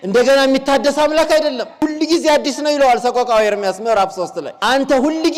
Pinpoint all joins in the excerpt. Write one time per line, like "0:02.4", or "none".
0:01.7
0:04.5